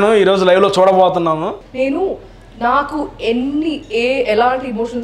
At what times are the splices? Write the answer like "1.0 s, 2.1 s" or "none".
1.6 s